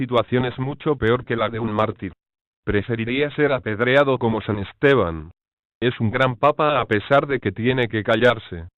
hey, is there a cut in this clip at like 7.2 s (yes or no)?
yes